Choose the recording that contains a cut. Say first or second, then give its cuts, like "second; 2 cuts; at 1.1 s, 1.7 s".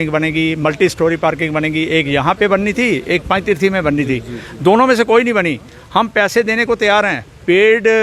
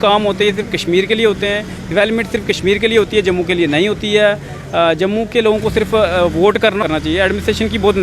second; 1 cut; at 6.8 s